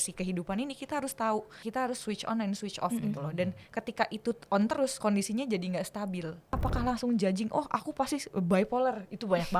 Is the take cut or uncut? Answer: cut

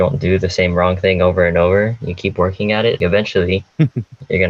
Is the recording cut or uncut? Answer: cut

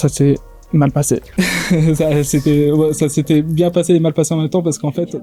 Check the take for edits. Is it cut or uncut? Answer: uncut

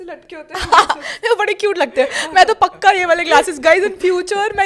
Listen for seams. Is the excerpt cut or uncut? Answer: uncut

